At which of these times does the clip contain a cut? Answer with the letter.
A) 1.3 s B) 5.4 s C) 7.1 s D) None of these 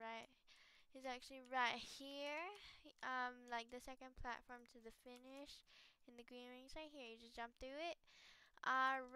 D